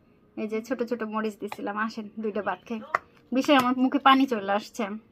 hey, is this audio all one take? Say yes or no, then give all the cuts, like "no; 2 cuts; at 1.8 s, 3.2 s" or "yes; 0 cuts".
yes; 0 cuts